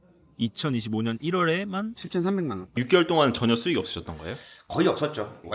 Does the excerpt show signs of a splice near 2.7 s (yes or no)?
yes